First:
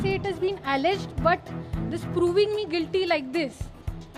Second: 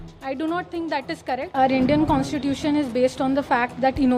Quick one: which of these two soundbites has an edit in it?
second; 1 cut; at 1.5 s

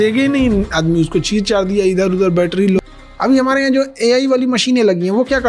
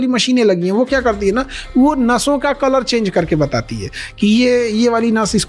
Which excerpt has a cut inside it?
first; 1 cut; at 2.8 s

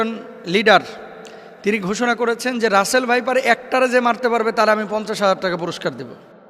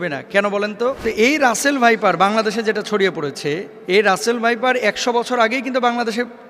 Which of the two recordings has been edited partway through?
second; 2 cuts; at 1.0 s, 3.7 s

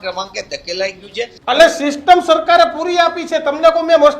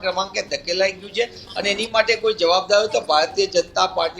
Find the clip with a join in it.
first; 1 cut; at 1.4 s

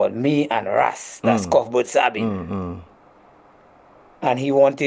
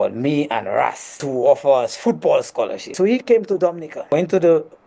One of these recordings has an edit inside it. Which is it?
second; 3 cuts; at 1.1 s, 2.9 s, 4.0 s

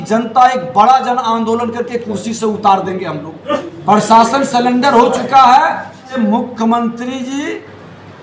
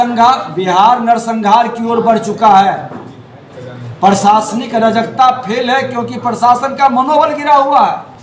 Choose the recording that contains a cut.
first; 2 cuts; at 3.7 s, 6.1 s

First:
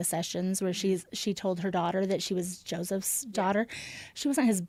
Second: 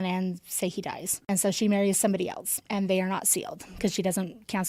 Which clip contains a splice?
second; 1 cut; at 1.1 s

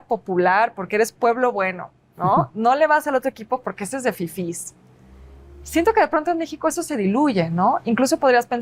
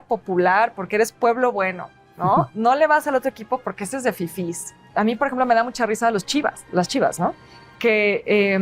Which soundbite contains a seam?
second; 1 cut; at 4.8 s

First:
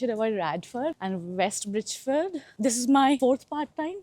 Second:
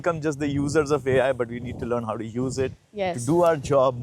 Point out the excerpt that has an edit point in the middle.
first; 2 cuts; at 1.0 s, 2.5 s

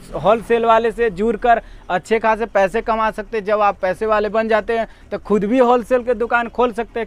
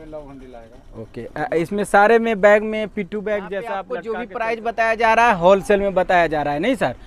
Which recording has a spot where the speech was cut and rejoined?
second; 1 cut; at 4.1 s

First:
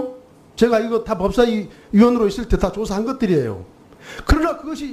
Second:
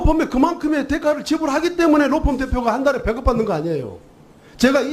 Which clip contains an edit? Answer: second; 1 cut; at 2.0 s

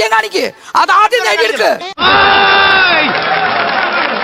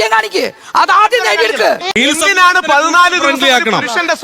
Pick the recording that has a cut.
second; 1 cut; at 1.9 s

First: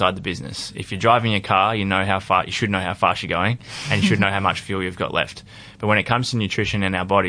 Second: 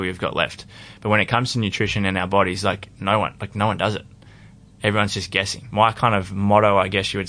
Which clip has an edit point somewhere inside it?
second; 1 cut; at 5.6 s

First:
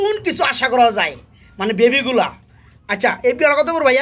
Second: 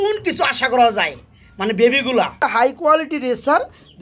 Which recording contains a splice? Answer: second; 1 cut; at 2.8 s

